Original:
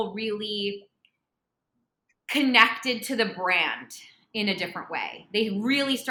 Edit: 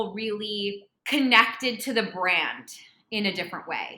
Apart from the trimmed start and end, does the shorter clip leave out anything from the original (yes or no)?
yes